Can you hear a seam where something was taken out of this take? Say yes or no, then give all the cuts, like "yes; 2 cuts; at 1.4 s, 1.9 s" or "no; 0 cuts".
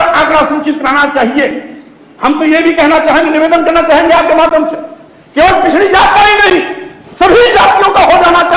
no; 0 cuts